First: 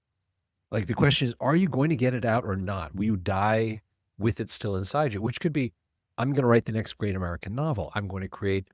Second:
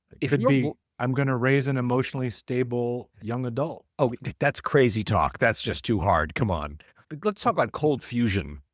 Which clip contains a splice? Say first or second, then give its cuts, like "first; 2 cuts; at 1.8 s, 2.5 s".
second; 1 cut; at 7.0 s